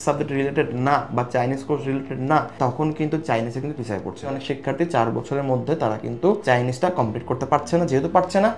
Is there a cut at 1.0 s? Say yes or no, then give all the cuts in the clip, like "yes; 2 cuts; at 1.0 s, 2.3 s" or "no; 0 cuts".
no; 2 cuts; at 2.6 s, 4.3 s